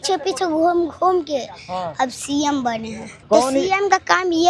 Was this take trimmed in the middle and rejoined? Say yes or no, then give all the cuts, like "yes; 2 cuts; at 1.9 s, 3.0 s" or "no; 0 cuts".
yes; 1 cut; at 3.2 s